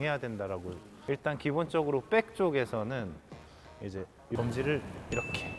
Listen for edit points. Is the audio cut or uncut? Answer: uncut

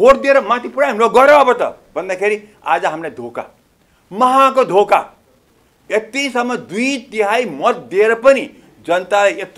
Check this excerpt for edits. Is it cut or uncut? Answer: uncut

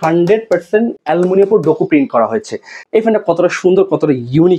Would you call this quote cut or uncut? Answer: cut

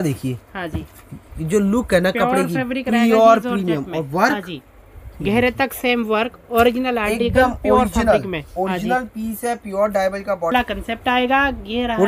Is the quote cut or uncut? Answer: cut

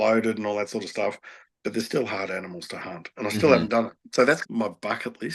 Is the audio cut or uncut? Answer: cut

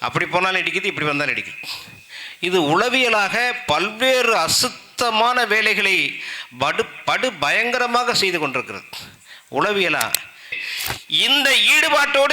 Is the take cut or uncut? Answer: cut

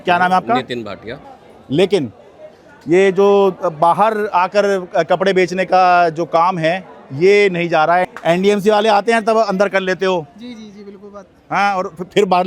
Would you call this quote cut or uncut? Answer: cut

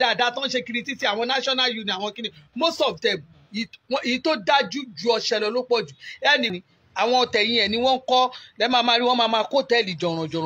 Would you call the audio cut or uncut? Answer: cut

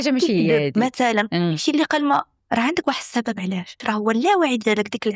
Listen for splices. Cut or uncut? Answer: cut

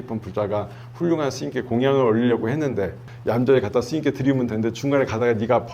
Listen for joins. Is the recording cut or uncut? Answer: cut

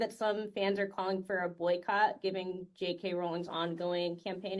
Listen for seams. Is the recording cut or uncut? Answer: uncut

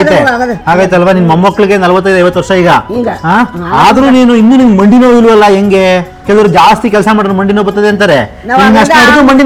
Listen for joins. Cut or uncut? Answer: uncut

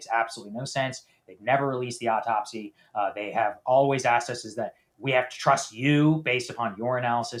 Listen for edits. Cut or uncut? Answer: uncut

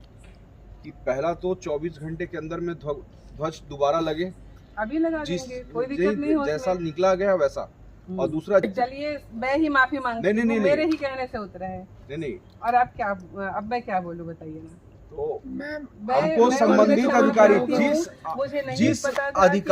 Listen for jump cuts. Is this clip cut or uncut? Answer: cut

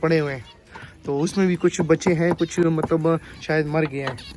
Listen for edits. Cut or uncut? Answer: uncut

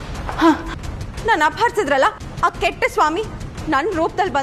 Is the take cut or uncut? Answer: uncut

